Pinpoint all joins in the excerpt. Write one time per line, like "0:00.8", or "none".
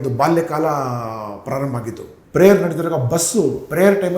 0:02.1